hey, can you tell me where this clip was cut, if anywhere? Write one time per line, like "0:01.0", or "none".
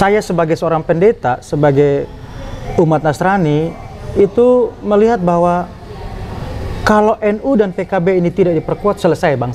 none